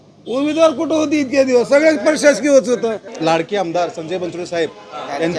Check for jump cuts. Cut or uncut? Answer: cut